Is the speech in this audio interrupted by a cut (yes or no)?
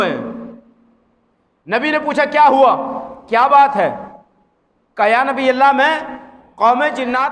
no